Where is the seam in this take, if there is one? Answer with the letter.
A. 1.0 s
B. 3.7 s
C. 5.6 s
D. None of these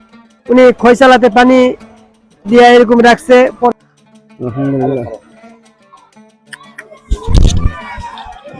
B